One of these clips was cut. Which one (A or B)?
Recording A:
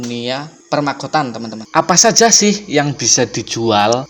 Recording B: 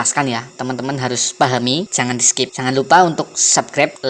A